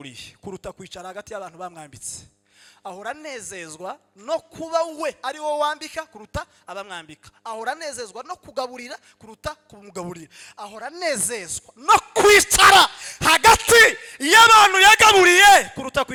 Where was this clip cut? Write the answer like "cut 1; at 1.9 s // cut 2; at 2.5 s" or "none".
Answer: none